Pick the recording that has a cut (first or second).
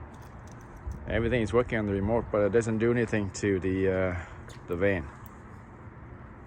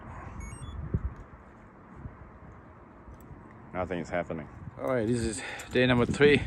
second